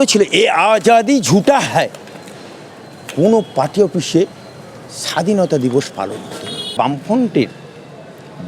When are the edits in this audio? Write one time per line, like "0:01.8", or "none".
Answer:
0:06.7

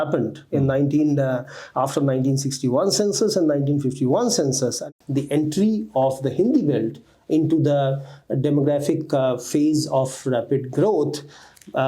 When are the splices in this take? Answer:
0:04.8

